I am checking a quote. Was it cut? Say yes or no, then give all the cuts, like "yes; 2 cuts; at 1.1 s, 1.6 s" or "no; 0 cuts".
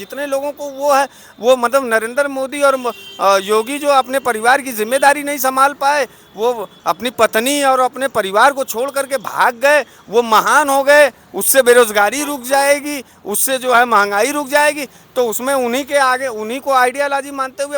no; 0 cuts